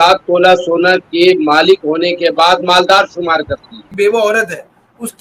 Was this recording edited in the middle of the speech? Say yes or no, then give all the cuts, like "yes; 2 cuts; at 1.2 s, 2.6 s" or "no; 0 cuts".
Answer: yes; 1 cut; at 3.9 s